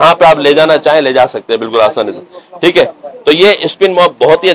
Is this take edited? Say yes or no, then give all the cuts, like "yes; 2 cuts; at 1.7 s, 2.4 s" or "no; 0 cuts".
no; 0 cuts